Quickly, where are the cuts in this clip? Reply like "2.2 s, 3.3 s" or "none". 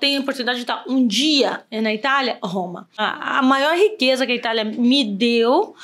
3.0 s